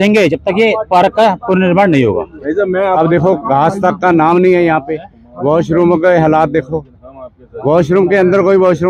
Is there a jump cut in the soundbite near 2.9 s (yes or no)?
yes